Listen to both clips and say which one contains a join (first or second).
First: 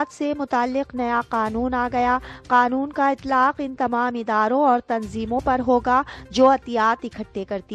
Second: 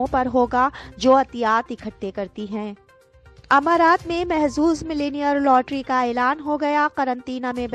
second